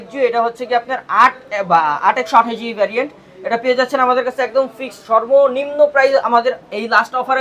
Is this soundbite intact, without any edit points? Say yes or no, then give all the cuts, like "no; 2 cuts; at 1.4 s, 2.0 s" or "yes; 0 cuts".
yes; 0 cuts